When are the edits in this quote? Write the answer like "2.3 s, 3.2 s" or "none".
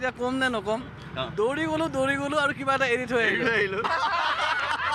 3.8 s